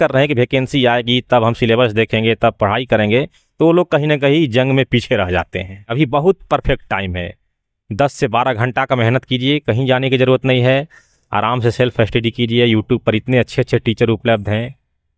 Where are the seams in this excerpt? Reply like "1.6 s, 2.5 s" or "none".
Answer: 5.9 s